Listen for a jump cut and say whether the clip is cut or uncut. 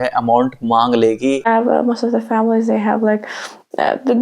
cut